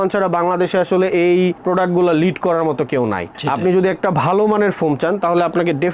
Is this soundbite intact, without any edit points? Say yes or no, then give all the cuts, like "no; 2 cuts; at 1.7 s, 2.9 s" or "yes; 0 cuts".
yes; 0 cuts